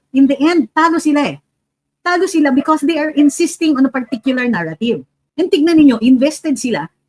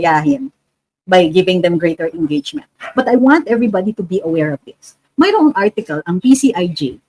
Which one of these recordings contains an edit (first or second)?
first